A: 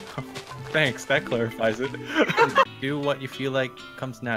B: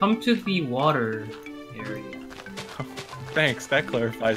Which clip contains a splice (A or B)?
A